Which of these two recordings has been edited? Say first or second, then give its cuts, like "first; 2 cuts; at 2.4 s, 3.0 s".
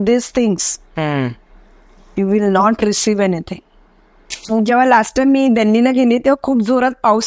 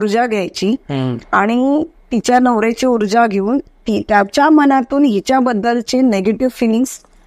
first; 1 cut; at 4.5 s